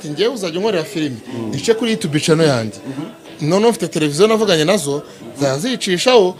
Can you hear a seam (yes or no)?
no